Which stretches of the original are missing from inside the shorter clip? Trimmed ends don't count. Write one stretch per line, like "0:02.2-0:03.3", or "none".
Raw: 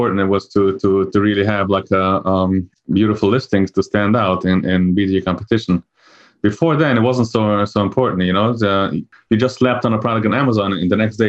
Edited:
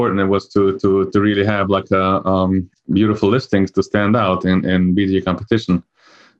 none